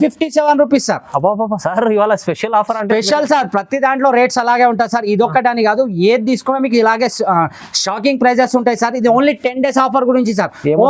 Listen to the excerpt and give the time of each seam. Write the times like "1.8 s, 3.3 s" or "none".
none